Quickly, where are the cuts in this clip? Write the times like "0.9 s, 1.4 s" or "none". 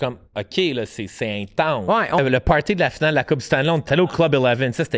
2.2 s, 3.8 s